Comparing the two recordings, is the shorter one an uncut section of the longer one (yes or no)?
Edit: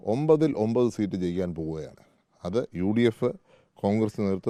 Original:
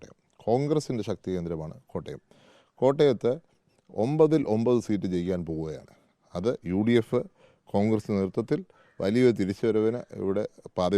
yes